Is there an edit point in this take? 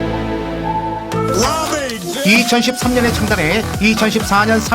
yes; 1 cut; at 0.9 s

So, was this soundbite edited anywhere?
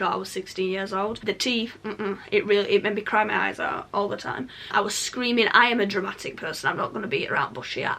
yes; 2 cuts; at 1.2 s, 4.7 s

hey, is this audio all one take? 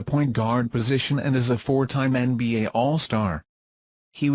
yes; 0 cuts

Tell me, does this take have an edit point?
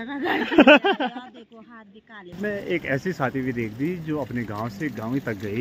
yes; 1 cut; at 2.4 s

